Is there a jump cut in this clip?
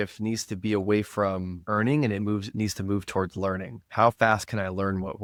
no; 0 cuts

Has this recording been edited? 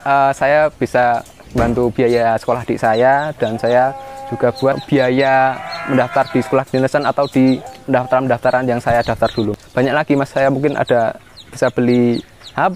yes; 4 cuts; at 1.4 s, 4.8 s, 7.7 s, 9.6 s

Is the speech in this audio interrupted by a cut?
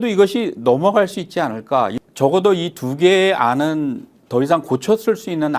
yes; 1 cut; at 1.9 s

